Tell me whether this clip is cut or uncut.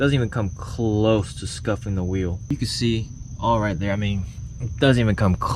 cut